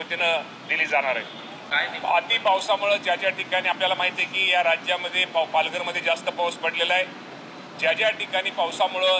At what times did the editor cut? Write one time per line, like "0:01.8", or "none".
0:01.7